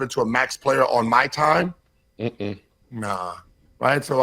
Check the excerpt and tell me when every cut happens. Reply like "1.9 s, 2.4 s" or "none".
3.1 s